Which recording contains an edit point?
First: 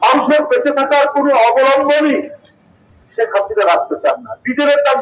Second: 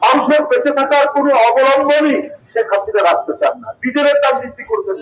second; 1 cut; at 2.4 s

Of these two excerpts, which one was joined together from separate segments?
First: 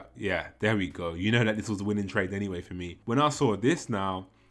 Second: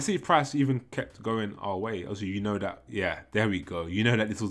first; 1 cut; at 2.9 s

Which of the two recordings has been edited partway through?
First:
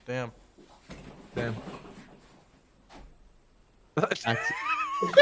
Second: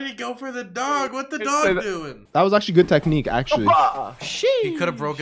second; 1 cut; at 2.1 s

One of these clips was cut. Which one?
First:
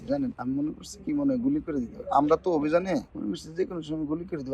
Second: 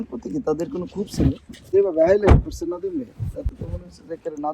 second; 1 cut; at 1.7 s

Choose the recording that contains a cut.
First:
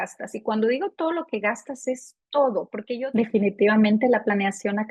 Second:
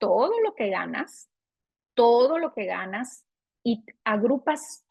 first; 1 cut; at 2.9 s

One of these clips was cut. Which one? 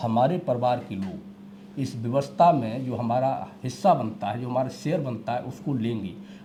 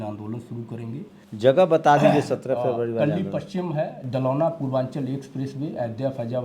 second; 1 cut; at 1.2 s

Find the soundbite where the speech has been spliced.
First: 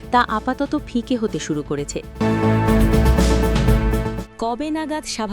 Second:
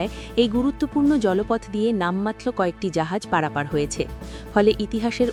first; 2 cuts; at 2.0 s, 4.2 s

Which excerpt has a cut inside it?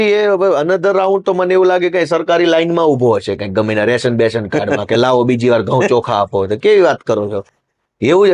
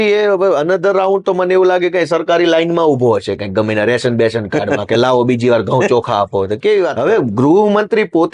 second; 1 cut; at 6.9 s

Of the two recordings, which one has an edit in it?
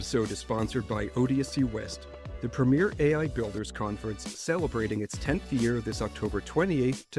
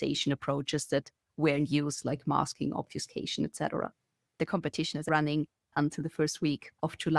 second; 1 cut; at 4.4 s

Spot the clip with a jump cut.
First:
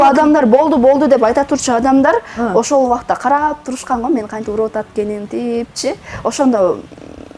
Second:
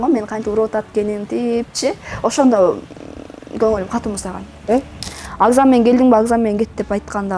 second; 1 cut; at 5.0 s

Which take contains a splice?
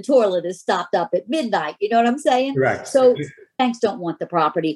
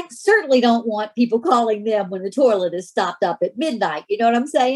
first; 1 cut; at 3.5 s

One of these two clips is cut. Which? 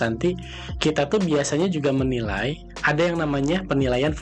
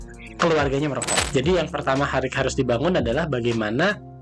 second; 1 cut; at 1.2 s

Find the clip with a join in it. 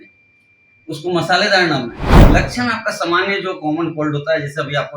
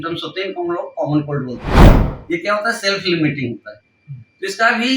first; 1 cut; at 2.2 s

